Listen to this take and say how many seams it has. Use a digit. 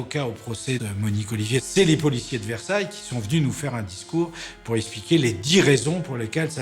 1